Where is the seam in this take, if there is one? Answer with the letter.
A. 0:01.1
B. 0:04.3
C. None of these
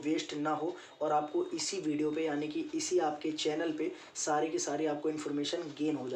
A